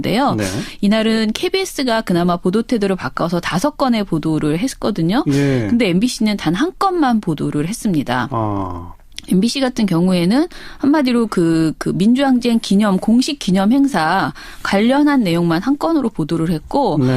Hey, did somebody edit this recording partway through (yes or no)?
yes